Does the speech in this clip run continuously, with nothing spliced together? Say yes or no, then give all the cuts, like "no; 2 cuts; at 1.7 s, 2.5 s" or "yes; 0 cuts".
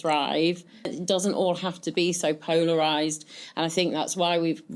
no; 1 cut; at 0.9 s